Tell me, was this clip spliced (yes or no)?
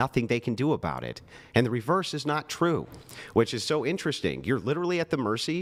no